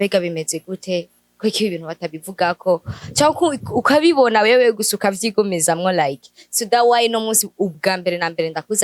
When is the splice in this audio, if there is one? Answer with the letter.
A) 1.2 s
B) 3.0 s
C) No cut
C